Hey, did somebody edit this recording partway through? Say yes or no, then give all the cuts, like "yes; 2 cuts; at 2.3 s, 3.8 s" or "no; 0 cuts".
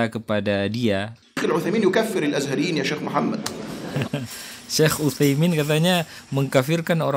yes; 1 cut; at 1.2 s